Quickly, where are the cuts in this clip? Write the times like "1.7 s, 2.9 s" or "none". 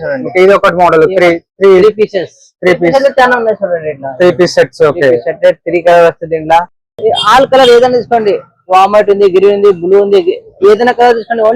6.8 s